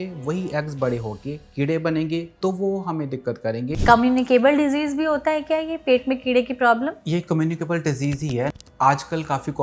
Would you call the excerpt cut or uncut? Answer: cut